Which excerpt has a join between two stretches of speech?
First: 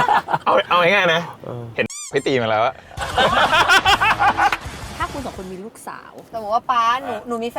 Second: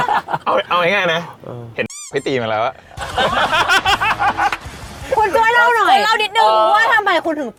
first; 2 cuts; at 4.9 s, 6.3 s

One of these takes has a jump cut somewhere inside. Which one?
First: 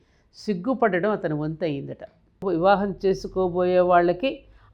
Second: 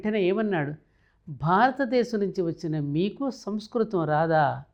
first; 1 cut; at 2.4 s

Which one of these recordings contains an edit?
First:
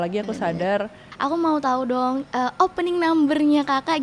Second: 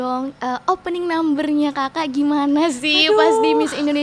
first; 1 cut; at 1.0 s

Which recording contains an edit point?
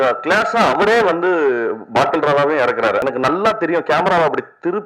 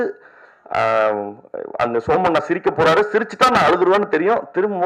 first; 1 cut; at 3.0 s

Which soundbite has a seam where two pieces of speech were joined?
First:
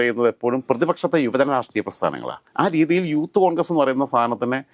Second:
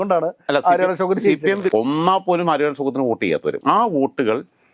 second; 2 cuts; at 1.7 s, 3.6 s

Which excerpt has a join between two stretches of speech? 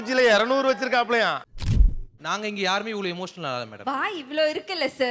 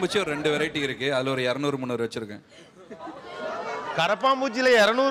first; 1 cut; at 1.7 s

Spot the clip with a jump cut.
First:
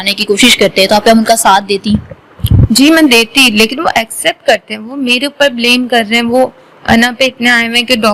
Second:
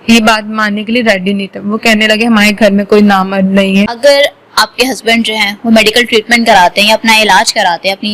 second; 1 cut; at 3.9 s

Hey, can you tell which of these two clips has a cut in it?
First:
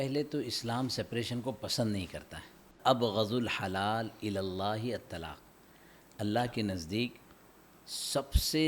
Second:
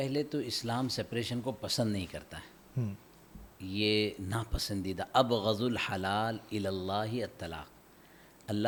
first; 1 cut; at 2.7 s

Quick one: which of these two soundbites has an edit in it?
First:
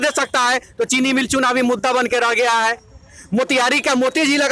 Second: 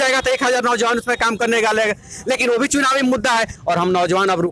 second; 1 cut; at 3.5 s

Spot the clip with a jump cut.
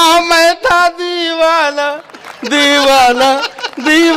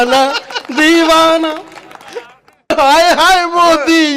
second; 1 cut; at 2.7 s

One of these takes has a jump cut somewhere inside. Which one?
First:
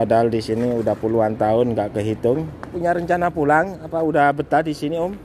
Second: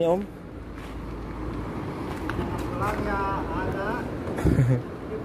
first; 1 cut; at 2.7 s

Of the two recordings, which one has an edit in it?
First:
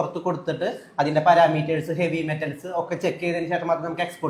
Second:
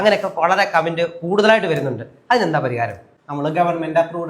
second; 1 cut; at 3.1 s

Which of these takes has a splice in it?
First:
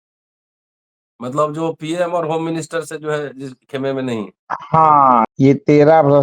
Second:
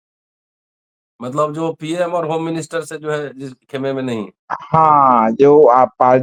first; 1 cut; at 5.2 s

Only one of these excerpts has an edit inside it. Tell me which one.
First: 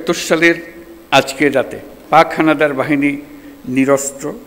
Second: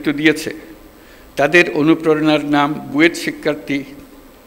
first; 1 cut; at 1.9 s

